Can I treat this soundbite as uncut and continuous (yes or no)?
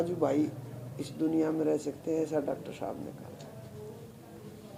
yes